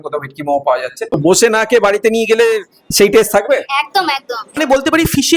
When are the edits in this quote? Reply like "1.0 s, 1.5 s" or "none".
1.1 s, 4.6 s